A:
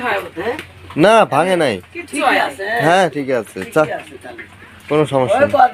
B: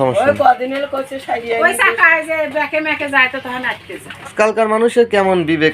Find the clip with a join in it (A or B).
B